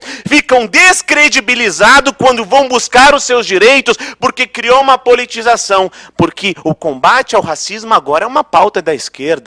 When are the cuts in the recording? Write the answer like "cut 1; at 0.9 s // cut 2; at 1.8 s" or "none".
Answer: none